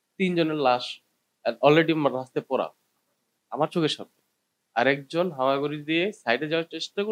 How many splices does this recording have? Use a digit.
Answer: 0